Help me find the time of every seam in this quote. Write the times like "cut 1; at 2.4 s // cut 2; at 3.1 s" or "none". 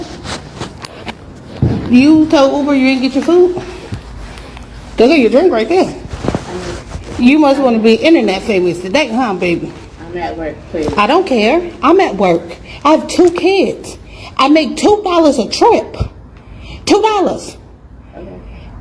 cut 1; at 12.5 s